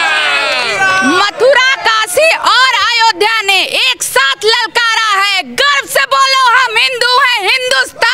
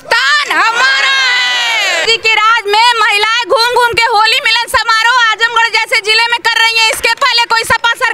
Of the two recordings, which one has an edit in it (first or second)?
second